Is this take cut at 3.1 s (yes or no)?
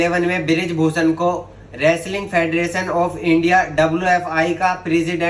no